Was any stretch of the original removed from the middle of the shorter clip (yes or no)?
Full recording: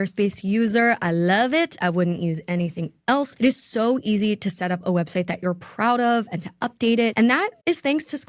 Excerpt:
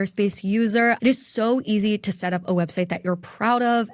yes